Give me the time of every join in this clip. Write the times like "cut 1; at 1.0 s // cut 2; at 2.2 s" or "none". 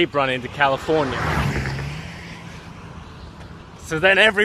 none